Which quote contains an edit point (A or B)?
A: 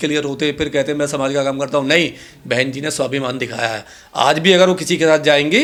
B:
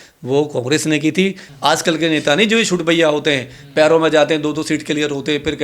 B